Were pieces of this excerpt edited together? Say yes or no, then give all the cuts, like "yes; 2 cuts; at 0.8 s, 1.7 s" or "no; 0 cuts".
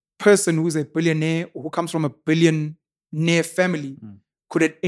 no; 0 cuts